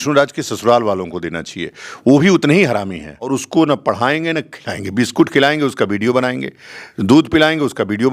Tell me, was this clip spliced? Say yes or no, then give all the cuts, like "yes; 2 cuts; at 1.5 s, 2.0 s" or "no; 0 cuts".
yes; 1 cut; at 3.3 s